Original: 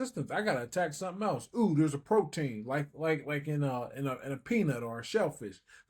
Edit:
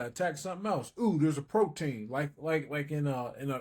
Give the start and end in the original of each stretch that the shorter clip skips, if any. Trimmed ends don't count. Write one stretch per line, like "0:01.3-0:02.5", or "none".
none